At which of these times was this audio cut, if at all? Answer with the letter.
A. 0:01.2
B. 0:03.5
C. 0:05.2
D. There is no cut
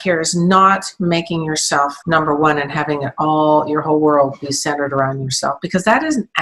D